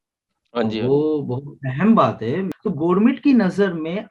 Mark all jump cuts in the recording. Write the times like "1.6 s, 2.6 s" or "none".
2.5 s